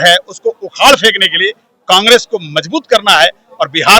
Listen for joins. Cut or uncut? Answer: uncut